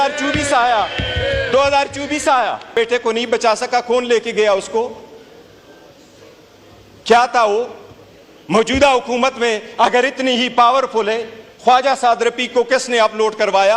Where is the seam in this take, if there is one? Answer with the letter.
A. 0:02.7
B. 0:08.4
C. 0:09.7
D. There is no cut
A